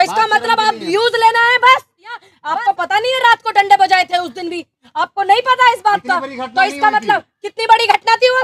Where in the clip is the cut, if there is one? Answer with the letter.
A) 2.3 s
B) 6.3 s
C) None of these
A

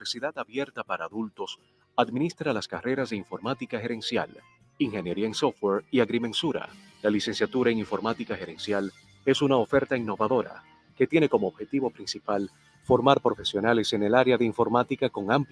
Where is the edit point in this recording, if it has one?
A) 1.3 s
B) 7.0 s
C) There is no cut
A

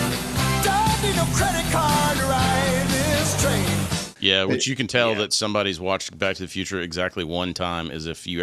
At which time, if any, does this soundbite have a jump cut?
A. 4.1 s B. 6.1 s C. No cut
A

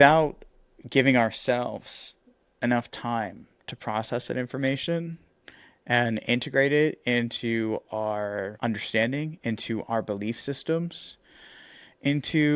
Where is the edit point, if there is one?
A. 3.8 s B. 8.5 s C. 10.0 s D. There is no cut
B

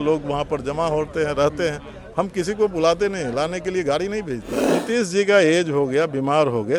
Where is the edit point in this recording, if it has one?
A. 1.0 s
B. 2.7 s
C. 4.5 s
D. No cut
C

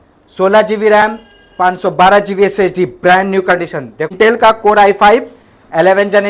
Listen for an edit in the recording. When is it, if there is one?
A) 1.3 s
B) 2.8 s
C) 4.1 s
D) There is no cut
C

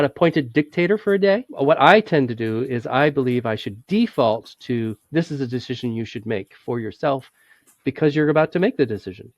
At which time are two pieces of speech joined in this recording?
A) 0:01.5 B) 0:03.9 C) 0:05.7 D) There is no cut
A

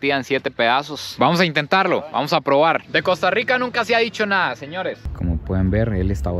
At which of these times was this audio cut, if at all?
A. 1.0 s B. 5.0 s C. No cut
B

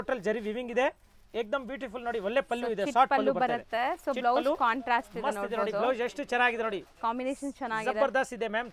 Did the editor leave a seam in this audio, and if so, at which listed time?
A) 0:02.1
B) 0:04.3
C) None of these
C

